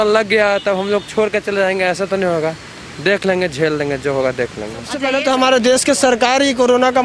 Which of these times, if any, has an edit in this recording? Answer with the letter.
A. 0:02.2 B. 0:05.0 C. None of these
B